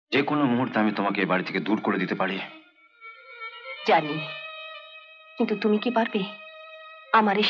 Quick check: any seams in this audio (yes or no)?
no